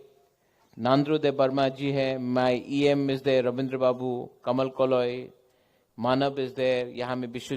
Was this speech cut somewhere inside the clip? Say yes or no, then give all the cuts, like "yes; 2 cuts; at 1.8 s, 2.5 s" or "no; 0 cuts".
yes; 1 cut; at 1.1 s